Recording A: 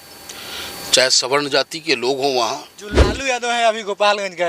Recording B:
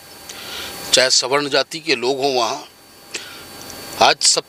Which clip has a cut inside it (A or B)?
A